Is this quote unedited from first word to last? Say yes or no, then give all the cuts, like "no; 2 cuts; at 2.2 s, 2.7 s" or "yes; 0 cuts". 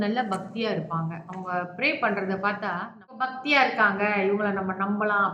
no; 1 cut; at 3.2 s